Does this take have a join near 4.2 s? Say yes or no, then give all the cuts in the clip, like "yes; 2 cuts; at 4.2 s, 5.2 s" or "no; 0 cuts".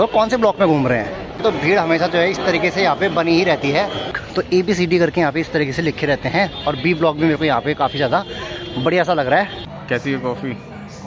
yes; 3 cuts; at 1.4 s, 4.2 s, 9.6 s